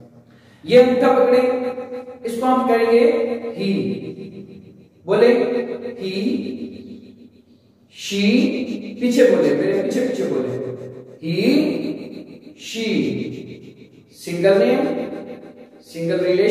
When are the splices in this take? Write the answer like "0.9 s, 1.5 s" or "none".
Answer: none